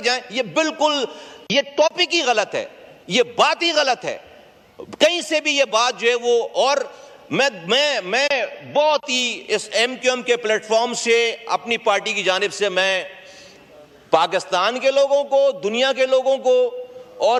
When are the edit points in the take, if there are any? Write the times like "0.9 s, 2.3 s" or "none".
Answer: none